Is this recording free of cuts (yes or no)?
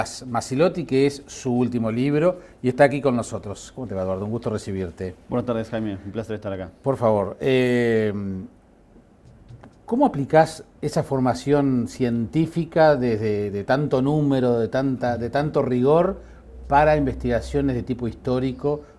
no